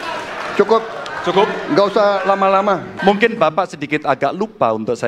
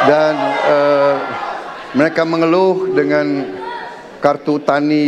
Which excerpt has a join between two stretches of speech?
first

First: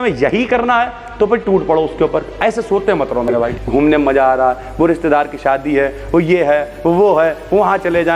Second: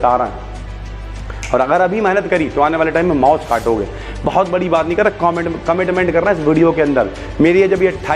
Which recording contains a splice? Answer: first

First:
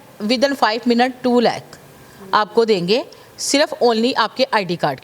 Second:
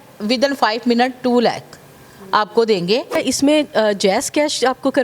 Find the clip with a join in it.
second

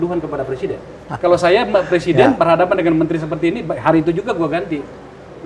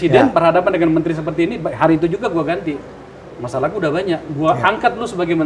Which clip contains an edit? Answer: first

